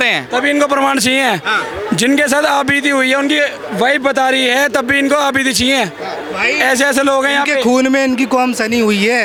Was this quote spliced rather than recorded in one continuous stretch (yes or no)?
no